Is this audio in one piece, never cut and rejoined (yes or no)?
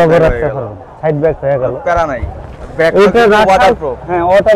yes